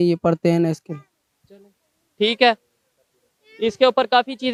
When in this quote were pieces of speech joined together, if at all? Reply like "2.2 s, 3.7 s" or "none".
none